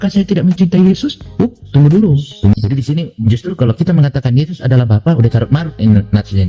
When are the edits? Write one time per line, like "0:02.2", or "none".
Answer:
0:02.5